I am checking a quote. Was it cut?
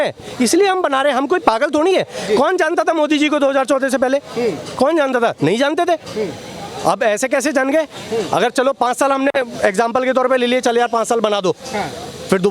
no; 0 cuts

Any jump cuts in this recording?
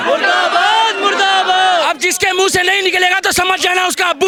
no; 0 cuts

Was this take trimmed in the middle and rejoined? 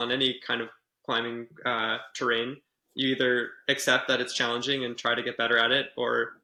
no; 0 cuts

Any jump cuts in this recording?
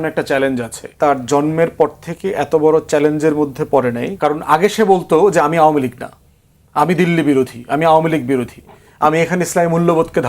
yes; 2 cuts; at 0.9 s, 4.1 s

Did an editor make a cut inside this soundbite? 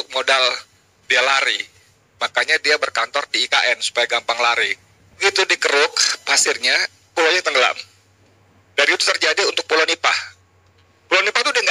yes; 1 cut; at 5.2 s

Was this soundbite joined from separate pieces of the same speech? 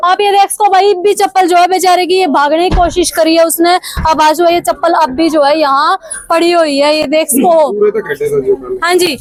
no; 0 cuts

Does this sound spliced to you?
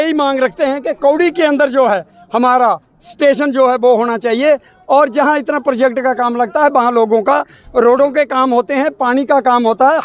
no; 0 cuts

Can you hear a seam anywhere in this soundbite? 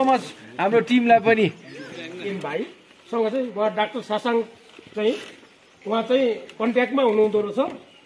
yes; 1 cut; at 2.3 s

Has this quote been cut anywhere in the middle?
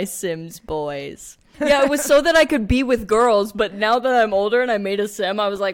yes; 1 cut; at 1.4 s

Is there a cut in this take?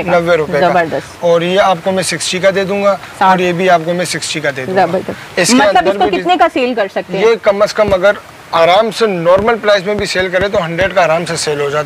no; 0 cuts

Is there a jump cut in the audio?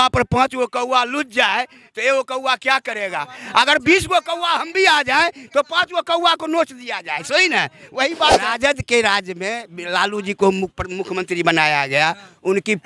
yes; 1 cut; at 8.5 s

